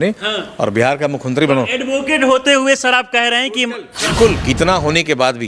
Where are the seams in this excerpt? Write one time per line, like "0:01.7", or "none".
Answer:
0:04.4

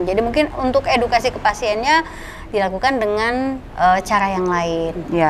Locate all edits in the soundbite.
none

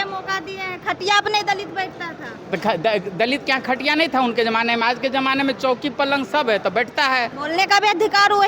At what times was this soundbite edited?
0:07.4

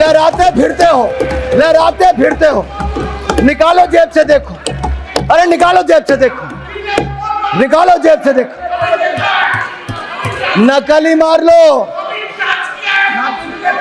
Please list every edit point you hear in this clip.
none

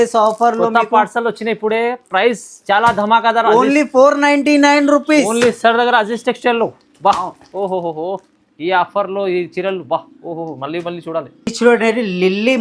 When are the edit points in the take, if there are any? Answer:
none

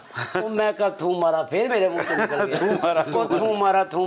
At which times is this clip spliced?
none

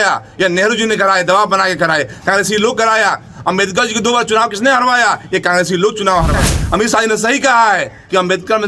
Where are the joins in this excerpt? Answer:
0:06.5

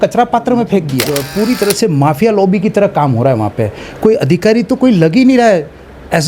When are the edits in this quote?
0:01.0

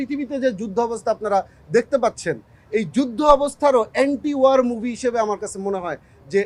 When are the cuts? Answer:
none

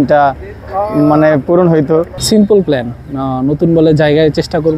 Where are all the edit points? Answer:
0:02.2

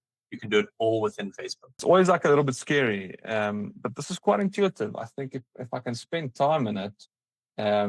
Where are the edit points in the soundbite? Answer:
0:01.8

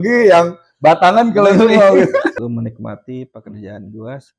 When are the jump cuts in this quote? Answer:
0:02.3

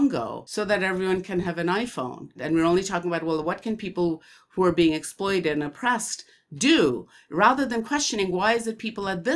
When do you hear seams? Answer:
0:02.3

